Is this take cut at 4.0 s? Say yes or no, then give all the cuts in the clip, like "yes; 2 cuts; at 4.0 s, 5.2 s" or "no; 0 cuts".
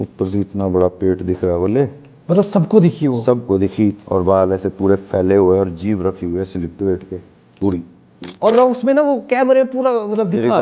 yes; 2 cuts; at 4.0 s, 8.2 s